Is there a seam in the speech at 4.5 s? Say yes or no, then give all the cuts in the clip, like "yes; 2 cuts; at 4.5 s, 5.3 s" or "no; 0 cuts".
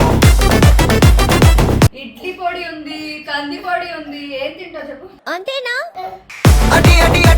no; 1 cut; at 2.1 s